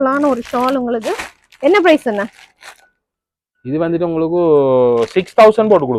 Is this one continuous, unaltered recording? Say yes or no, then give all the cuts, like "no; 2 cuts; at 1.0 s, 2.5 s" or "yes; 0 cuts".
yes; 0 cuts